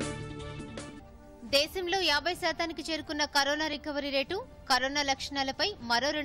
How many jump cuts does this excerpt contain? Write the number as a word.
one